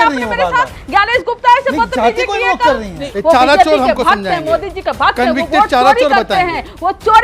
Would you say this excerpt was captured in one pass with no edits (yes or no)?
no